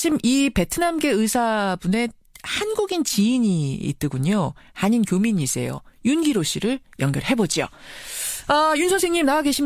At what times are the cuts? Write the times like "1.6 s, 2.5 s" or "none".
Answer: 2.2 s